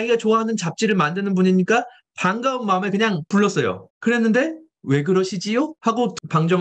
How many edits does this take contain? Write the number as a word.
zero